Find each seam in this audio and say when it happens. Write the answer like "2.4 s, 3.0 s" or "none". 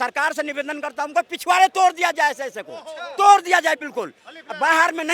none